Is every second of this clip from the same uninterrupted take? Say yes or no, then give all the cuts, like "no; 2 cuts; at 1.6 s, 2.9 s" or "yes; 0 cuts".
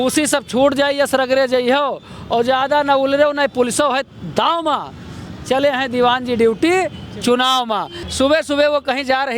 no; 1 cut; at 8.0 s